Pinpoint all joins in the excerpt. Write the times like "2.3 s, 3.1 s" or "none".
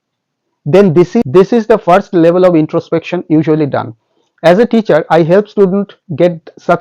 1.2 s